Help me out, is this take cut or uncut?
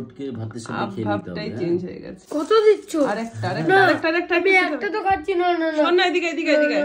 cut